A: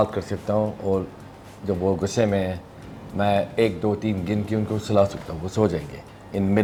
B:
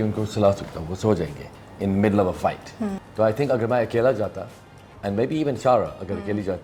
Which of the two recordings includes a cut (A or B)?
B